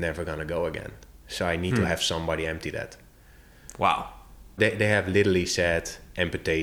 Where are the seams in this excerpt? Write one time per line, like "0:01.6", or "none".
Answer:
0:04.6